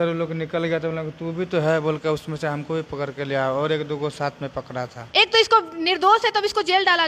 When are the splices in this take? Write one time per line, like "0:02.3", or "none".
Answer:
0:05.0